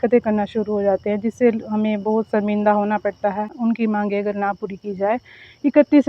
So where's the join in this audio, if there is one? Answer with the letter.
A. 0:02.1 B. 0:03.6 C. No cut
B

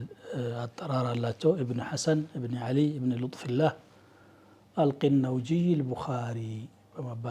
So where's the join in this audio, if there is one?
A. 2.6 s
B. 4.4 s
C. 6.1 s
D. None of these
D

